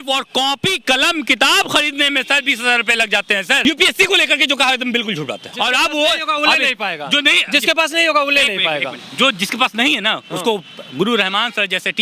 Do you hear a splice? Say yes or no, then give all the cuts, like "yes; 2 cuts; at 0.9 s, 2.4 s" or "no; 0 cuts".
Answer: yes; 2 cuts; at 3.7 s, 5.5 s